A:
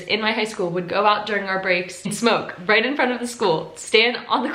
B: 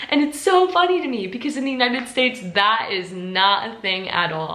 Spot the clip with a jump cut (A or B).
A